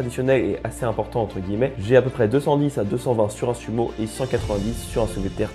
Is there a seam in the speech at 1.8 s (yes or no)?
yes